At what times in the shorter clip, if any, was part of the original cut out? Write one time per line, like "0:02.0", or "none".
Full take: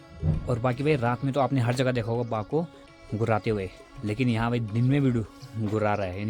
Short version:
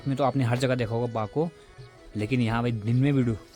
0:01.9